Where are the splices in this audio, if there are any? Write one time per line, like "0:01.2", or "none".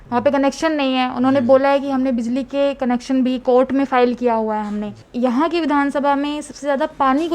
0:05.0